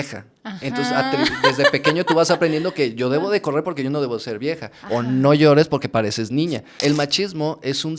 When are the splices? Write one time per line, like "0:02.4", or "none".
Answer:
0:06.7